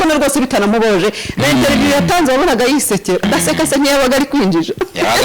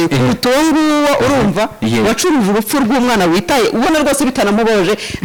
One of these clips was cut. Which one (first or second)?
first